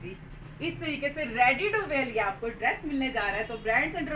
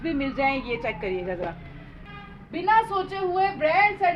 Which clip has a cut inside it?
second; 1 cut; at 2.1 s

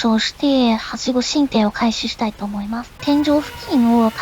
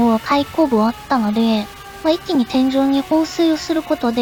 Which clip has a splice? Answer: first; 1 cut; at 3.0 s

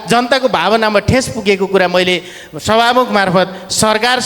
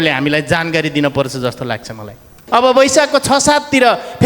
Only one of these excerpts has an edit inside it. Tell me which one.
second; 1 cut; at 2.4 s

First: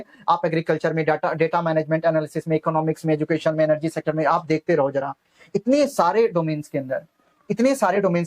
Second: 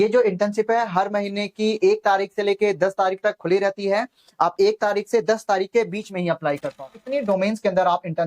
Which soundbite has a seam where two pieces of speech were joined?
second; 1 cut; at 7.0 s

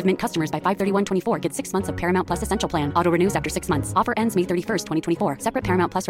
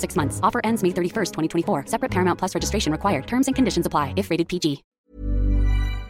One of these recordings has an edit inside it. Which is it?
second; 1 cut; at 4.9 s

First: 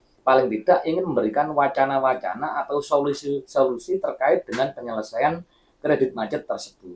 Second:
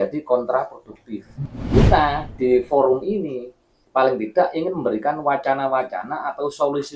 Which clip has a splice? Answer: second; 1 cut; at 1.4 s

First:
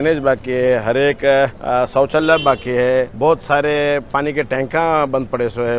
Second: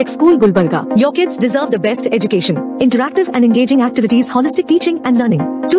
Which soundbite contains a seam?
first; 2 cuts; at 1.6 s, 3.1 s

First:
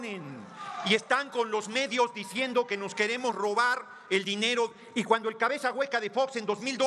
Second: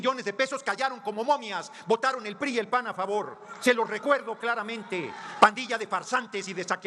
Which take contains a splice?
first; 1 cut; at 2.7 s

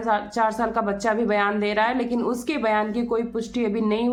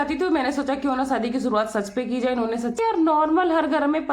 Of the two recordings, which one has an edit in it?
second; 1 cut; at 2.8 s

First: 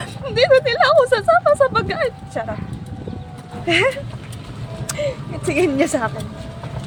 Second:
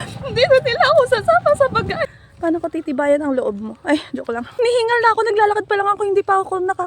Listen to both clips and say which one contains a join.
second; 2 cuts; at 2.1 s, 4.6 s

